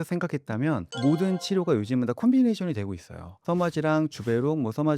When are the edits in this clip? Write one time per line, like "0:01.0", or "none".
0:03.4